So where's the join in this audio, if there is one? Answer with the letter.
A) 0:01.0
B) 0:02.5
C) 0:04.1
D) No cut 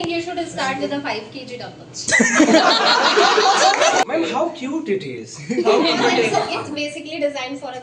C